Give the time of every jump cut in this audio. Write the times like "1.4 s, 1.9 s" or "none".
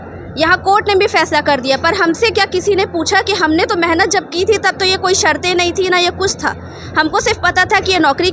none